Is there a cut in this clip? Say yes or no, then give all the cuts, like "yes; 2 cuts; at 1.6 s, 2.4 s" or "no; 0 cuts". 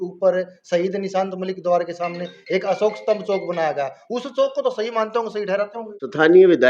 yes; 1 cut; at 5.8 s